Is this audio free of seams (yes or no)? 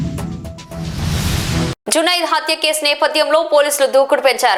yes